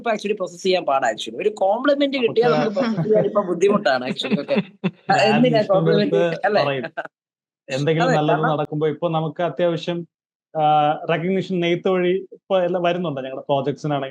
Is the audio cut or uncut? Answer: uncut